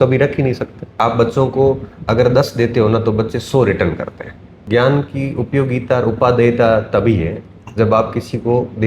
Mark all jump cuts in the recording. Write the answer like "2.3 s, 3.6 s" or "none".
0.9 s, 4.7 s